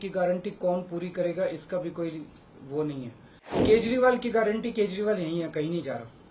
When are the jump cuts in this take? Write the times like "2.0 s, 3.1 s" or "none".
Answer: 3.6 s